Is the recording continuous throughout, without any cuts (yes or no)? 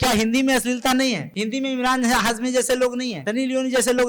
no